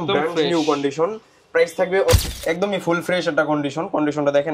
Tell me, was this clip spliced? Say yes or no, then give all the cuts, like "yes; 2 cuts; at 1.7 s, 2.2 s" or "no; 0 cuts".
yes; 1 cut; at 2.1 s